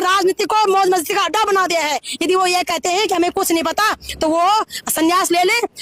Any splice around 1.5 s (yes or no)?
no